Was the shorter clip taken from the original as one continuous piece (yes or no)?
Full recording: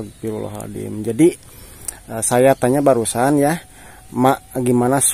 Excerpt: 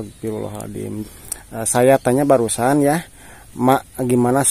no